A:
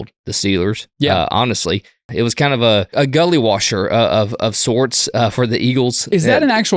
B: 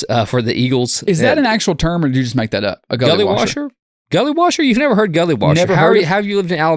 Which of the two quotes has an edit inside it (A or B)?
A